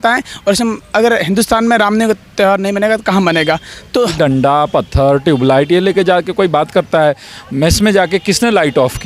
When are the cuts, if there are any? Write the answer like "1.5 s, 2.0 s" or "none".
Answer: 4.1 s